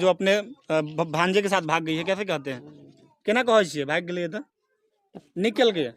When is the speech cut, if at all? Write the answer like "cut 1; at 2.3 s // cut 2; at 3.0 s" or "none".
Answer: none

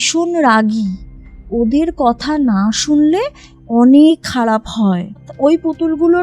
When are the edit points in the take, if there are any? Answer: cut 1; at 5.3 s

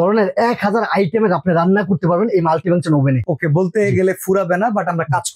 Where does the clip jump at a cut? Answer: none

